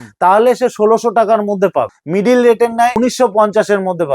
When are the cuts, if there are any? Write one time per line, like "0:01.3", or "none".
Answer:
0:02.0
0:03.0